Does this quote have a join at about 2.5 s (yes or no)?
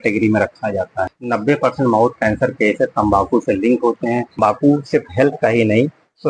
no